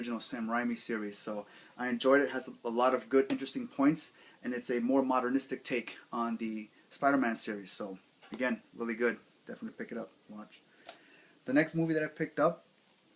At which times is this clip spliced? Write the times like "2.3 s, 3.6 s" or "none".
6.3 s